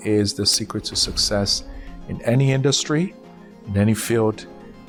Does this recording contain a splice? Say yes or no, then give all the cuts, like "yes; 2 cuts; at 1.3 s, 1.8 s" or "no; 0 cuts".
no; 0 cuts